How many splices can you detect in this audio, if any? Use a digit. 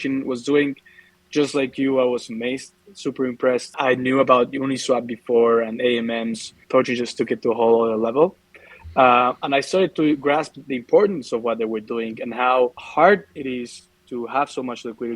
3